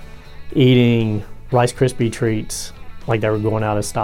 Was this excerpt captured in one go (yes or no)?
yes